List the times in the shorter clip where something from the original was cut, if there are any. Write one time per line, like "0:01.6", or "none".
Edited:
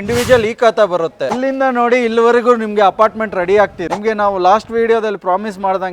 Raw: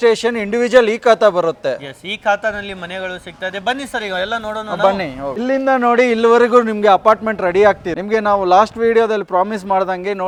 0:01.3